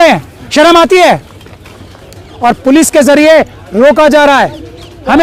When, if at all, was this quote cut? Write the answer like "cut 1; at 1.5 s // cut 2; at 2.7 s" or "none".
cut 1; at 2.0 s